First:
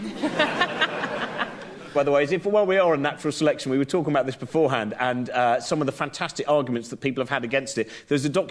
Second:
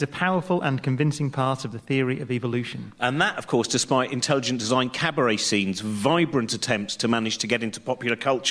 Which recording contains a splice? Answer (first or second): second